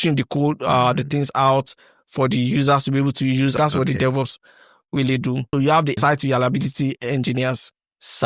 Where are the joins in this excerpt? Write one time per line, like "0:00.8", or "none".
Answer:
0:03.5
0:05.9